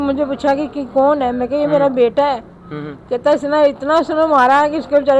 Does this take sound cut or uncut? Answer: uncut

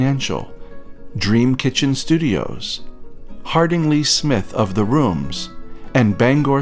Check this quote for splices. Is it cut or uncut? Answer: uncut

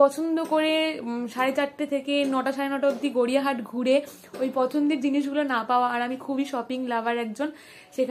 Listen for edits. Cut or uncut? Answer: uncut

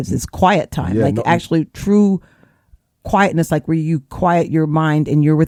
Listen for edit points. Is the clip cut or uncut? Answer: uncut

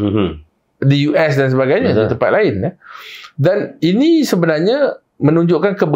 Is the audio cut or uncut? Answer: uncut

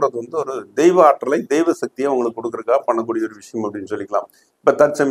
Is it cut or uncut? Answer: uncut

